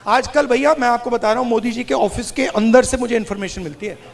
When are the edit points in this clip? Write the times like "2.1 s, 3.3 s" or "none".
none